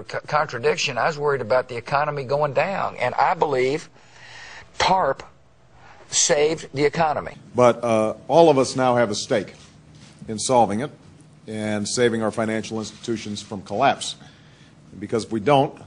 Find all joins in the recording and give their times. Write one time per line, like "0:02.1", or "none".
0:07.4